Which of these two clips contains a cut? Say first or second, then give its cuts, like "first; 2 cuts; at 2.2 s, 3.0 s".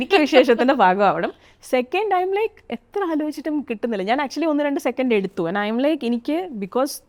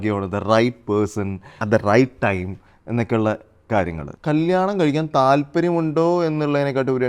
second; 2 cuts; at 1.5 s, 4.1 s